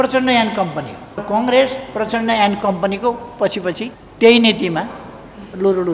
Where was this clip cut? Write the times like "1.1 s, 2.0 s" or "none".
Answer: 1.2 s, 3.9 s